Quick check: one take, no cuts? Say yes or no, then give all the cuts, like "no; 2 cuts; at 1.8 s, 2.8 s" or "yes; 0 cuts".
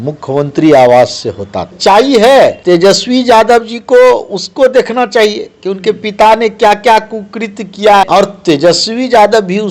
no; 3 cuts; at 1.8 s, 2.6 s, 8.0 s